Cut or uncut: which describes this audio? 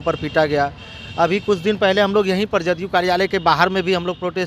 uncut